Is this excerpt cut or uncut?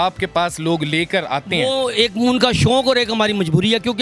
uncut